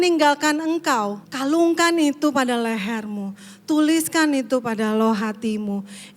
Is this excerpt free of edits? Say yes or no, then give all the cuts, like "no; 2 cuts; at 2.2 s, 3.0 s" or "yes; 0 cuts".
no; 1 cut; at 1.2 s